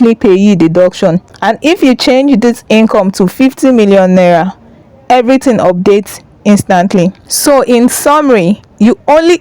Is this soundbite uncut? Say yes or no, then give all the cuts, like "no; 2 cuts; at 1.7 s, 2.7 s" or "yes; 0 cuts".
no; 1 cut; at 1.3 s